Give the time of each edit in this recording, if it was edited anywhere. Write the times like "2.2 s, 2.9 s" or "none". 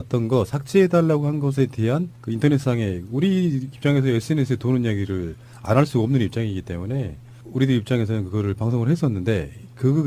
none